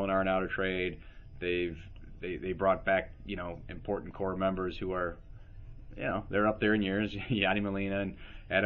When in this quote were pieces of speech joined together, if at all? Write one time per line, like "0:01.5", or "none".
none